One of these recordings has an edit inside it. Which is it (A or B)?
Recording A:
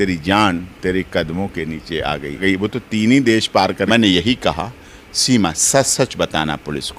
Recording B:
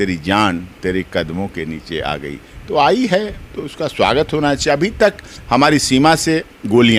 A